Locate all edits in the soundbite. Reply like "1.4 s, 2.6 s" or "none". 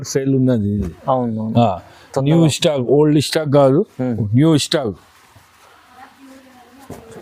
none